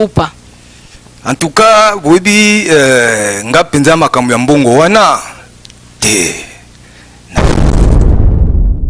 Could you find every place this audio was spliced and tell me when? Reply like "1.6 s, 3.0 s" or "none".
7.1 s